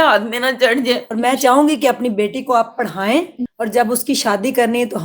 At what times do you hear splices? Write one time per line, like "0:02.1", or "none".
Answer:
0:01.1
0:03.4